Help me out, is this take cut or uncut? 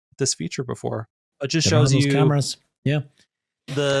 cut